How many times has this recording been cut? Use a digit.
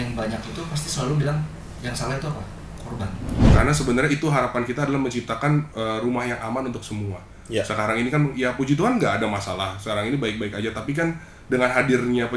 1